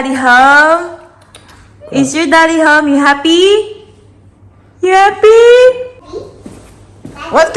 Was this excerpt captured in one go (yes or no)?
no